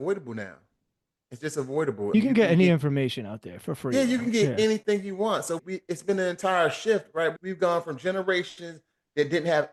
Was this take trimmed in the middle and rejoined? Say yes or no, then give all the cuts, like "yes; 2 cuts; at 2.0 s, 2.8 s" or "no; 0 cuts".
no; 0 cuts